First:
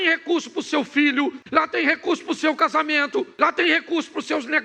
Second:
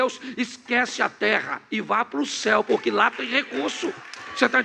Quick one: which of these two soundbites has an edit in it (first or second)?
first